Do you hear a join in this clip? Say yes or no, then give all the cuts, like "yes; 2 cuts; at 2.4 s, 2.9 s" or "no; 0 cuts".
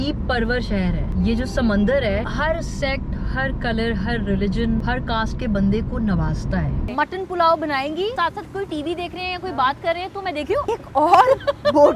yes; 6 cuts; at 1.1 s, 2.3 s, 4.8 s, 6.8 s, 8.1 s, 10.6 s